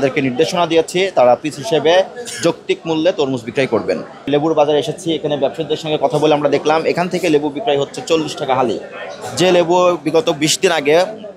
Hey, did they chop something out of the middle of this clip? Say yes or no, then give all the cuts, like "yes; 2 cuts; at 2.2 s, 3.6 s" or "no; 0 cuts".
no; 0 cuts